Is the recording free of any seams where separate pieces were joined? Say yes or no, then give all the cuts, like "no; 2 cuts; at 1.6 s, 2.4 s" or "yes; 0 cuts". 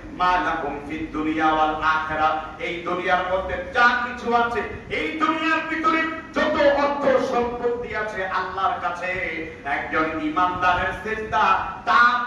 yes; 0 cuts